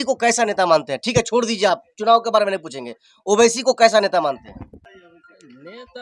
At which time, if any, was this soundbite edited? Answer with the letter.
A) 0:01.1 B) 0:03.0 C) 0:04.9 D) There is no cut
C